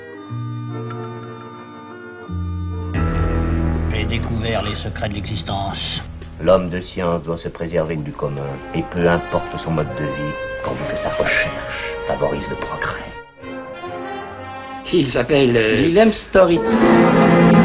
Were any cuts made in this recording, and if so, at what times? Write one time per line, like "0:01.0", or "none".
0:02.9